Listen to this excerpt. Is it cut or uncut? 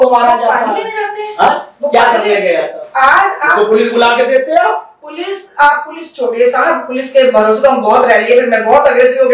uncut